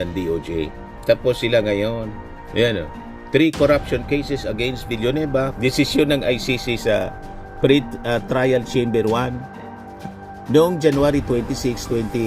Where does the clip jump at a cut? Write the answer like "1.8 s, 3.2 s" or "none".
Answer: 5.5 s